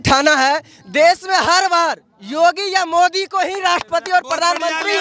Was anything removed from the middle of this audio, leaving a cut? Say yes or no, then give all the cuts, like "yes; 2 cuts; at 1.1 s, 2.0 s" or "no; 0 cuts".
no; 0 cuts